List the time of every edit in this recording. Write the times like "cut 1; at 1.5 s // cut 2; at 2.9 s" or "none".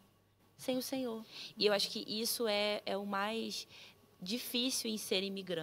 cut 1; at 1.4 s

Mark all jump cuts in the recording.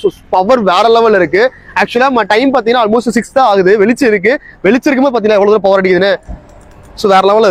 none

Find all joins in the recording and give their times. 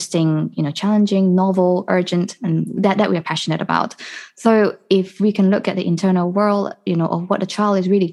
none

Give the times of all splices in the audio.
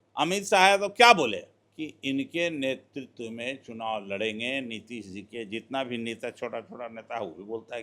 cut 1; at 1.6 s

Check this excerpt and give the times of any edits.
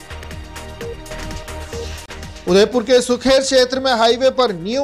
cut 1; at 1.0 s

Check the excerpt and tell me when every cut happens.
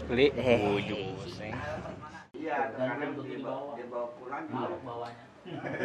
cut 1; at 2.2 s

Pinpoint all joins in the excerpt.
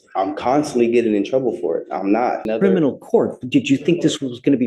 cut 1; at 2.4 s

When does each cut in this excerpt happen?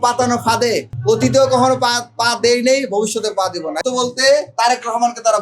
cut 1; at 3.8 s

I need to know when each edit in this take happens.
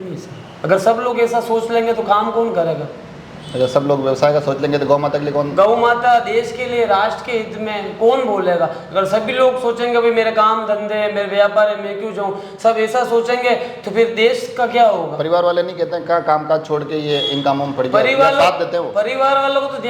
none

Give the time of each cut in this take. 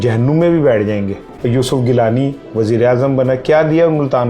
cut 1; at 1.2 s

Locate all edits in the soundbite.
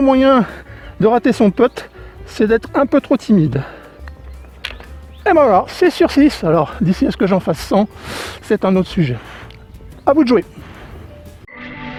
none

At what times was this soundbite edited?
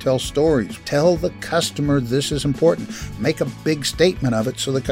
cut 1; at 0.8 s // cut 2; at 3.2 s

